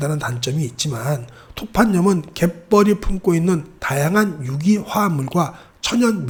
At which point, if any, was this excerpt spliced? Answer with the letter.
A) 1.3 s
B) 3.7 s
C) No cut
C